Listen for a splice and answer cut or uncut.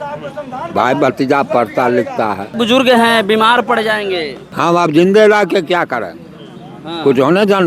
cut